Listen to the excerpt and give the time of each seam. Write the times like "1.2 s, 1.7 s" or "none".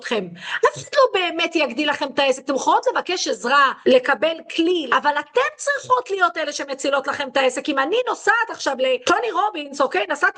3.8 s, 4.8 s, 9.0 s